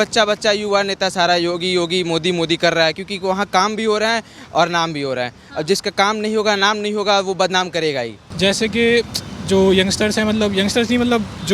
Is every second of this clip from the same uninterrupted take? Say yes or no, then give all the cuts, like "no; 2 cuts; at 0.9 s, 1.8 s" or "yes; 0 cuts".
no; 1 cut; at 8.2 s